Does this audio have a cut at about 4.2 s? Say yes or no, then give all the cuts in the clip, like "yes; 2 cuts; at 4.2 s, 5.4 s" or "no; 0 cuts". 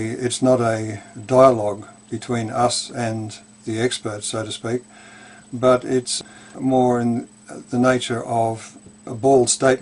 yes; 1 cut; at 4.2 s